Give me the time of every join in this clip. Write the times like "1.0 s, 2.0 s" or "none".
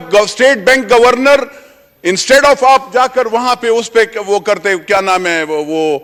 none